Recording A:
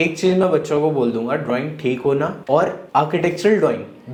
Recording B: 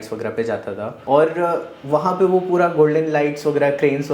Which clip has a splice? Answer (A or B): B